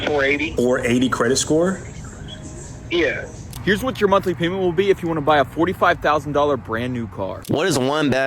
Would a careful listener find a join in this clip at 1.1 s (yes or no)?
no